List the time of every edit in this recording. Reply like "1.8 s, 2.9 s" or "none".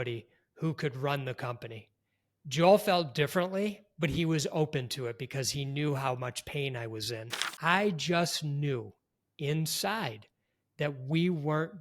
7.3 s